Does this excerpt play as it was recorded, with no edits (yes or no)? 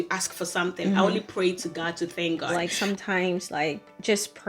no